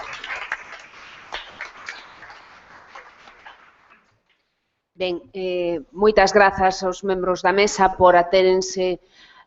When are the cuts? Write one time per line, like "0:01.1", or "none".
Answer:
none